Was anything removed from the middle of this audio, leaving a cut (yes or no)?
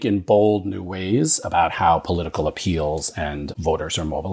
no